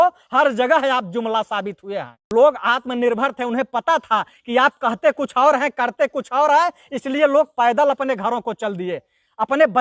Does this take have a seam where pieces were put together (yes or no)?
yes